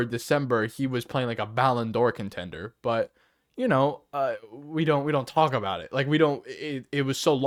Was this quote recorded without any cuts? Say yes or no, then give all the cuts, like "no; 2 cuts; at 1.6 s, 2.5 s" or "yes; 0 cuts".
yes; 0 cuts